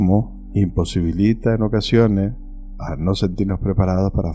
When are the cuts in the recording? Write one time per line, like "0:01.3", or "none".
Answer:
none